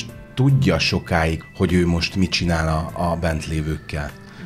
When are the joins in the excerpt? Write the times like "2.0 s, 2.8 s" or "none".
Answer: 1.4 s